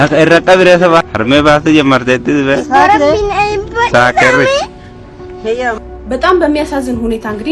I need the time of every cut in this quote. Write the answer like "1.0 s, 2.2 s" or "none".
1.1 s